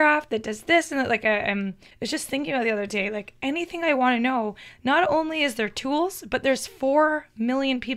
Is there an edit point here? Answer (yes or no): yes